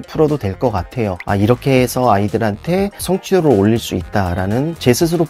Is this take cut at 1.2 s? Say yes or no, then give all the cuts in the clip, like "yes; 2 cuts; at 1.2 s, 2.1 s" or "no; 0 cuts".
yes; 1 cut; at 1.2 s